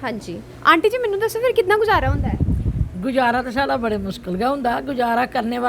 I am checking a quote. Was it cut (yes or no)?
no